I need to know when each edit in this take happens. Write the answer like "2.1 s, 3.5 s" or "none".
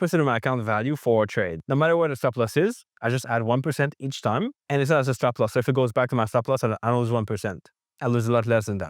1.6 s